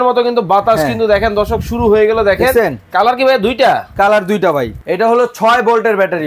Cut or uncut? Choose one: cut